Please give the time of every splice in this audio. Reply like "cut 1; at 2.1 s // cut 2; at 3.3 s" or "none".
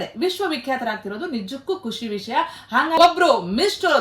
cut 1; at 3.0 s